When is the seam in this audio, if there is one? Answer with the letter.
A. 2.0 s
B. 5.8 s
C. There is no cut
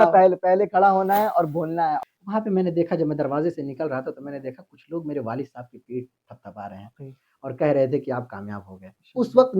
A